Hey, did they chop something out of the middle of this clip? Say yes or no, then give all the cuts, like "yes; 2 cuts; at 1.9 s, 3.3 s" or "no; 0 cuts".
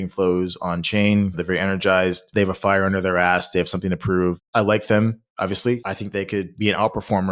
yes; 4 cuts; at 1.4 s, 2.2 s, 4.4 s, 6.2 s